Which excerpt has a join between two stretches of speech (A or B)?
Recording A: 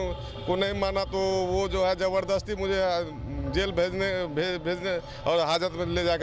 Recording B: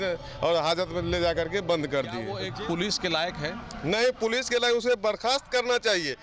B